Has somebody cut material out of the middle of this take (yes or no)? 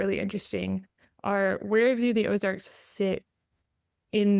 no